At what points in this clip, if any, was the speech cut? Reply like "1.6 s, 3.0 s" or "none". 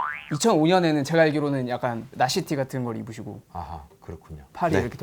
2.1 s